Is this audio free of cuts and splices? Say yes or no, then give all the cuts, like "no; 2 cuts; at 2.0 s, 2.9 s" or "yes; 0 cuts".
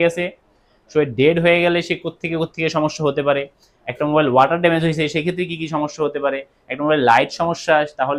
yes; 0 cuts